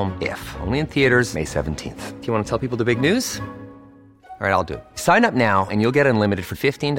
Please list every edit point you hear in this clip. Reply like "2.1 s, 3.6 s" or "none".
none